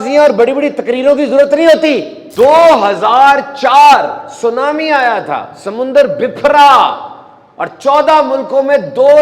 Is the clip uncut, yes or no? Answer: no